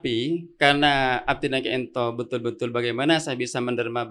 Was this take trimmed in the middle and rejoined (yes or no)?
no